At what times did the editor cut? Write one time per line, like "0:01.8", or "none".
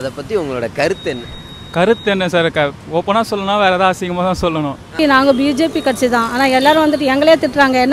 0:04.9